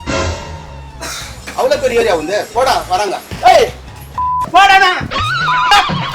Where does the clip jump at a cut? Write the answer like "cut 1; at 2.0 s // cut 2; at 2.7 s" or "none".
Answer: cut 1; at 3.2 s